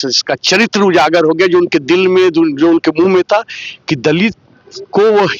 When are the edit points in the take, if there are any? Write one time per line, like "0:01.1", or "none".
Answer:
none